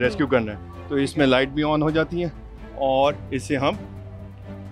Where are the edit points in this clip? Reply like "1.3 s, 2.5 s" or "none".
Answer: none